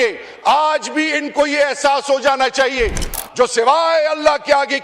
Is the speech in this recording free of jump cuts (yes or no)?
no